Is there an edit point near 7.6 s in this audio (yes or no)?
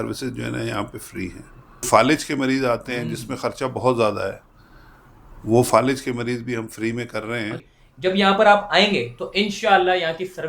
yes